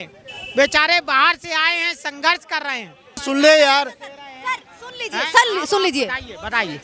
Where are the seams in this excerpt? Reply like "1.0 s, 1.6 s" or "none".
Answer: 3.2 s